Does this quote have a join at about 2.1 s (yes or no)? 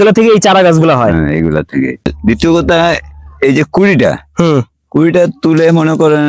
yes